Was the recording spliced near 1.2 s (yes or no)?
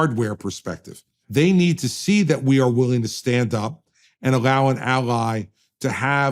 yes